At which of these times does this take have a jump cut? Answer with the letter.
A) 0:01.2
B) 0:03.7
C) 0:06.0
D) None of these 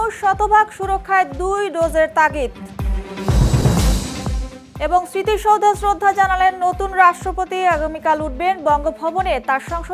D